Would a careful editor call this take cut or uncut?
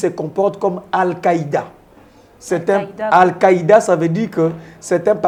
uncut